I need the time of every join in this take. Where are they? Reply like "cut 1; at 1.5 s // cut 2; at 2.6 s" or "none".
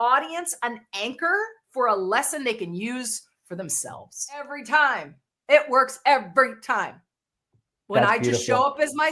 cut 1; at 4.6 s